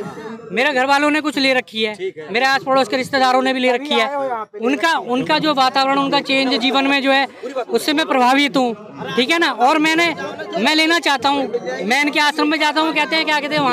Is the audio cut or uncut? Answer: uncut